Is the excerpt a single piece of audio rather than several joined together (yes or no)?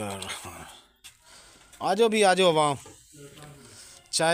yes